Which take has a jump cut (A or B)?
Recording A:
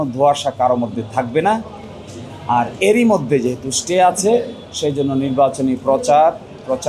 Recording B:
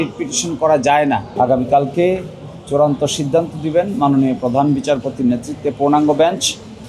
B